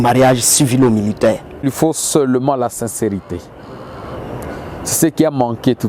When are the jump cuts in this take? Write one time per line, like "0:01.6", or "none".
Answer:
0:01.5